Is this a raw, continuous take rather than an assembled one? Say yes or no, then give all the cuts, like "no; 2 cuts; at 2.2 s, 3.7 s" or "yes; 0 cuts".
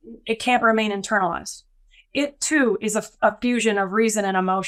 yes; 0 cuts